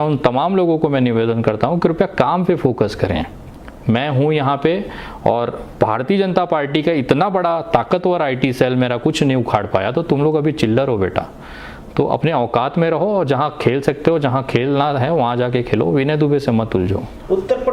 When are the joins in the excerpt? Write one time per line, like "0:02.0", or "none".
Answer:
none